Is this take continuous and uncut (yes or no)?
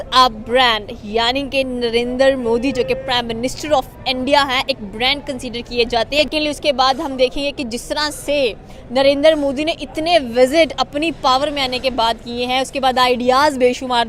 yes